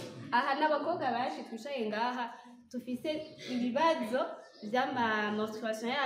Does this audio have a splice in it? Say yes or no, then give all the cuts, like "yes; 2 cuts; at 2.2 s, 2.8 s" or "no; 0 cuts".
no; 0 cuts